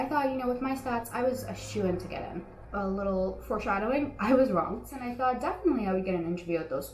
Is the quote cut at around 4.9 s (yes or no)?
yes